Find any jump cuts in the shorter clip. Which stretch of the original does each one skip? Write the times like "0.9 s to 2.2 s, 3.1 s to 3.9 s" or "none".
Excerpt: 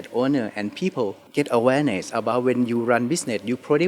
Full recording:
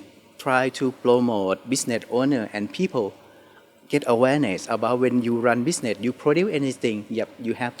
3.2 s to 3.8 s